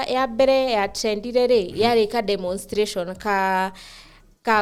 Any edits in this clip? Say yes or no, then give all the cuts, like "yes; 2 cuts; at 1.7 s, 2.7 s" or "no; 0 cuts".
no; 0 cuts